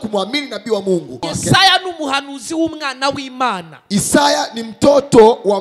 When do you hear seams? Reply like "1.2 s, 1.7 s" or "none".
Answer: 1.2 s

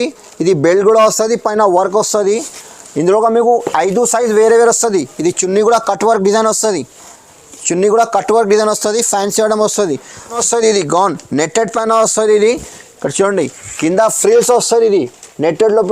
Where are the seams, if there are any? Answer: 10.4 s

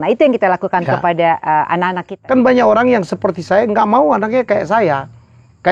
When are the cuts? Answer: 2.1 s

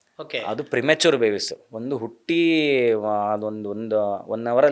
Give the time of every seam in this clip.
none

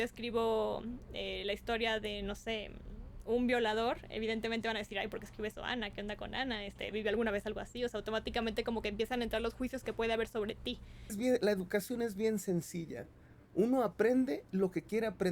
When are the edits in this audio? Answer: 11.2 s

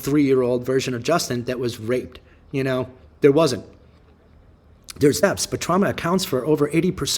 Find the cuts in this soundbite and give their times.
5.2 s

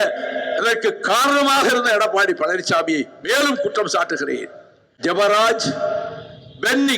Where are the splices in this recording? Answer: 5.0 s

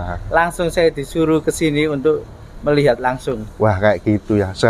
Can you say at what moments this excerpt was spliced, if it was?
none

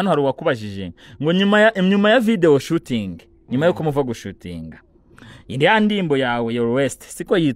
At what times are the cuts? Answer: none

